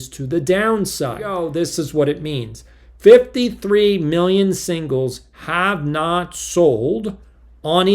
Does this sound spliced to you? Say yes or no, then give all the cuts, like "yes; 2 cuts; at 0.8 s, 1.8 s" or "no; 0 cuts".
yes; 1 cut; at 1.3 s